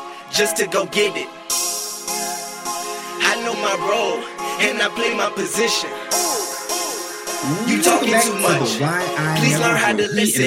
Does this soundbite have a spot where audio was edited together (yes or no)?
no